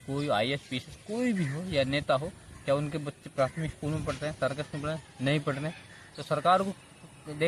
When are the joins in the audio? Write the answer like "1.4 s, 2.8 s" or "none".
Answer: none